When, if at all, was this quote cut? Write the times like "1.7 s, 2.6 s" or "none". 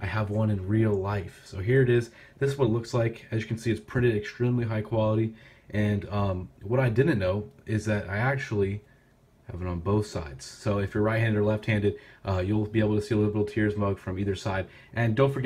12.9 s